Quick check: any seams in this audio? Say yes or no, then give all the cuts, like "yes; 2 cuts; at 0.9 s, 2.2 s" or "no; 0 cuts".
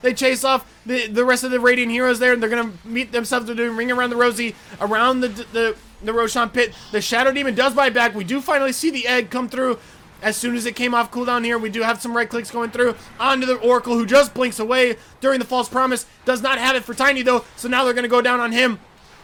no; 0 cuts